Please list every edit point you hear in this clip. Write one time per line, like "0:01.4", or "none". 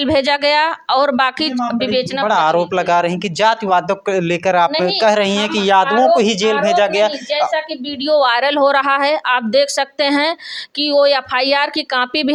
none

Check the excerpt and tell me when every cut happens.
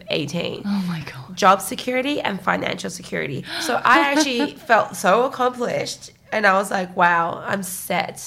0:01.2
0:03.5

